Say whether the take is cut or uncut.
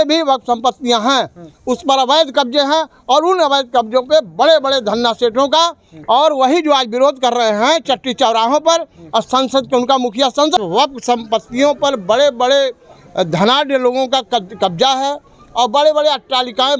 cut